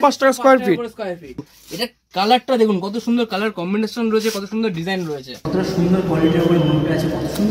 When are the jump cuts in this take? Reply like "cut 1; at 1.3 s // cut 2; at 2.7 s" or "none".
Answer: cut 1; at 1.5 s // cut 2; at 5.5 s